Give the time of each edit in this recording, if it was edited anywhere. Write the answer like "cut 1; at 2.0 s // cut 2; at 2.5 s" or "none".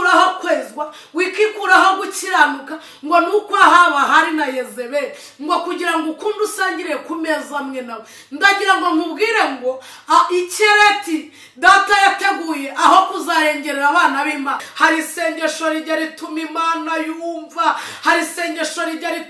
cut 1; at 14.7 s